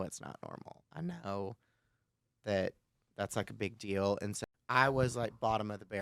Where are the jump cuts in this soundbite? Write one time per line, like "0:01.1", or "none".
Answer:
0:04.4